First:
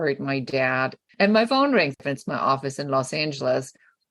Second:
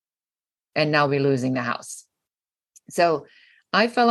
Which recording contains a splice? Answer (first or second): first